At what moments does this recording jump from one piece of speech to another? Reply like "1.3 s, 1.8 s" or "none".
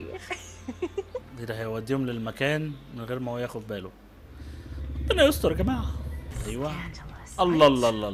6.3 s